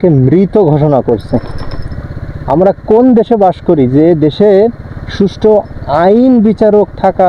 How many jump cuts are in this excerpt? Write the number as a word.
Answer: zero